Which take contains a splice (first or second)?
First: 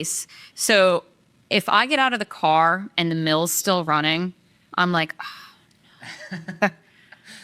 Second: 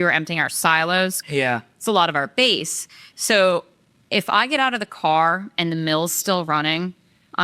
second